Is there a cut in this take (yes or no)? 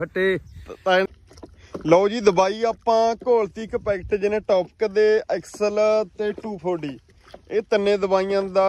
yes